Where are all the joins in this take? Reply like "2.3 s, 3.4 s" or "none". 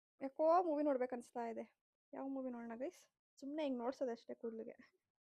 3.3 s